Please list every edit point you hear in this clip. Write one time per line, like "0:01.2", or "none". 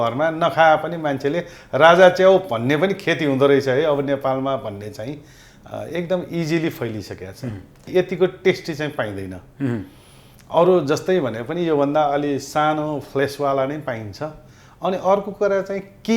0:07.8

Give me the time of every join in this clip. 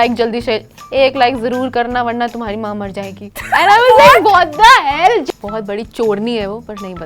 0:05.2

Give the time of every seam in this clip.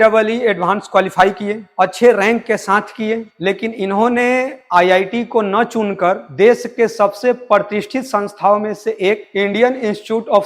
none

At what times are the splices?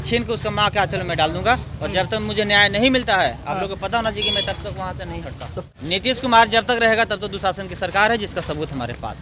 0:05.7

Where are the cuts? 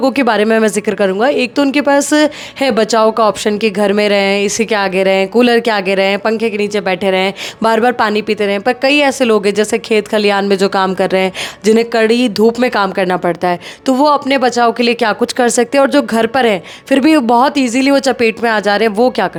none

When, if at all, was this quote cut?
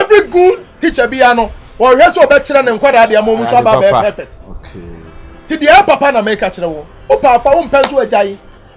none

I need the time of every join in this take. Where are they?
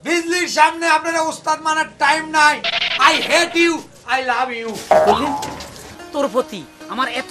0:05.9

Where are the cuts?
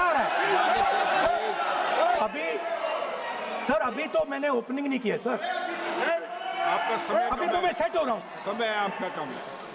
0:02.2

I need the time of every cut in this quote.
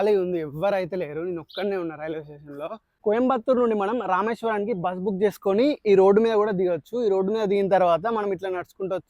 0:02.9

